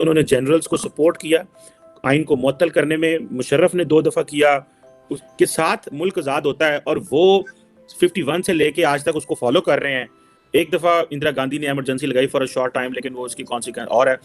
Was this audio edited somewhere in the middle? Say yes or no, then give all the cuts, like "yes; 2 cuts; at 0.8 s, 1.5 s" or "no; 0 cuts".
yes; 1 cut; at 5.1 s